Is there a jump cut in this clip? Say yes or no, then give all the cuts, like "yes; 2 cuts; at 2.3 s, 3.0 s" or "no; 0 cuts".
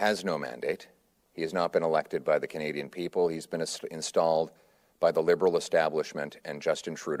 no; 0 cuts